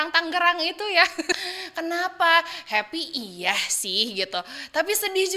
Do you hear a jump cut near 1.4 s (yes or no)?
yes